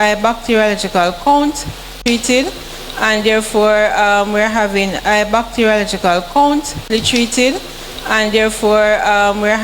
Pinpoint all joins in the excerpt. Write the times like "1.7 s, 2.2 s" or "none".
1.8 s, 3.1 s, 6.8 s, 8.2 s